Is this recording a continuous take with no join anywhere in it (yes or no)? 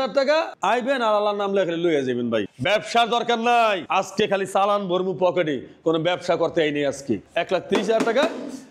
no